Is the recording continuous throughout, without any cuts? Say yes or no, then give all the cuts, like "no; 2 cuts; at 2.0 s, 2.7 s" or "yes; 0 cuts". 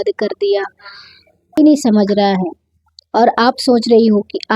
no; 1 cut; at 1.6 s